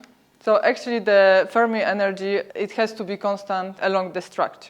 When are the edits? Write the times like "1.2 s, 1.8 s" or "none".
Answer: 2.5 s, 3.8 s